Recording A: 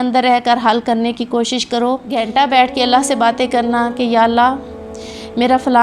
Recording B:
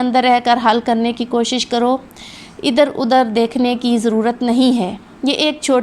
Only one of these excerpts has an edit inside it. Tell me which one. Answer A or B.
A